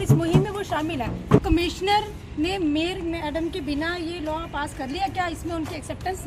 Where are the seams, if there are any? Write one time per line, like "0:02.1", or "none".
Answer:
0:01.4